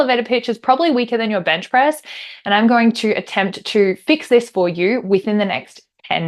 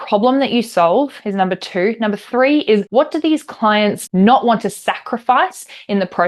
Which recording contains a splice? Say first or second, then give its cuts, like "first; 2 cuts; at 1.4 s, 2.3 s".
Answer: second; 2 cuts; at 2.9 s, 4.0 s